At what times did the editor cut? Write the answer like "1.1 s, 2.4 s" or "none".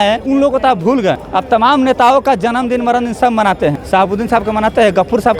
1.2 s, 3.8 s